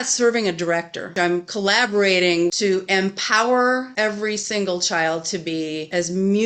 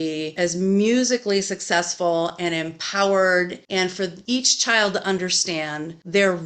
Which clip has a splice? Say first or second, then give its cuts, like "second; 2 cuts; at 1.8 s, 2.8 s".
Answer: first; 3 cuts; at 1.0 s, 2.5 s, 3.9 s